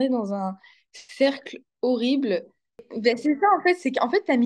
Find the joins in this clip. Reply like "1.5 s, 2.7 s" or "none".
2.8 s

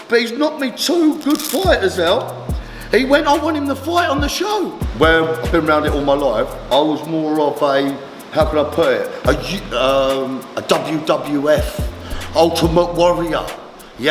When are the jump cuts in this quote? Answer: 4.8 s

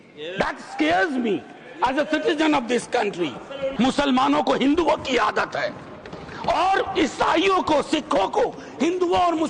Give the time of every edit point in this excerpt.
3.6 s

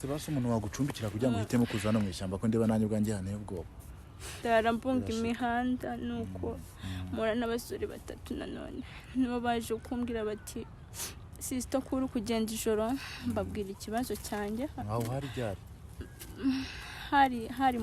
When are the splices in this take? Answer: 4.3 s

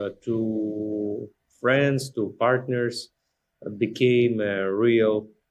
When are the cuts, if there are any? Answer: none

